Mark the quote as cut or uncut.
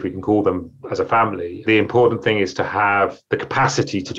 uncut